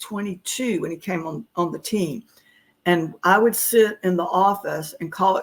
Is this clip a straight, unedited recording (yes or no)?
yes